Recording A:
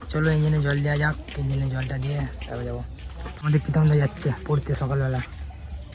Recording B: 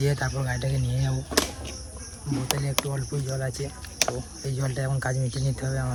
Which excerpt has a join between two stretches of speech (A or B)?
A